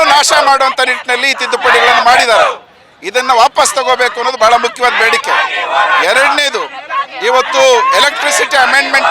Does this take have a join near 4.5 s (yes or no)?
no